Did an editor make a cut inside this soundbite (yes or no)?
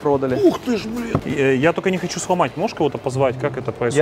yes